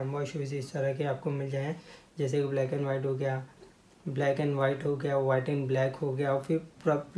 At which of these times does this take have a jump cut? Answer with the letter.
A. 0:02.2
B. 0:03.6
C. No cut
C